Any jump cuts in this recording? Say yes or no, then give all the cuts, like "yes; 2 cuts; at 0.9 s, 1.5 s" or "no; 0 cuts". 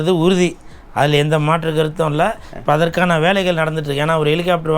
no; 0 cuts